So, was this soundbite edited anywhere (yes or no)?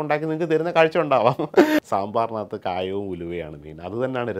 yes